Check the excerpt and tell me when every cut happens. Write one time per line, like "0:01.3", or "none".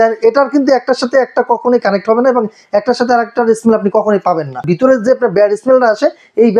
0:04.6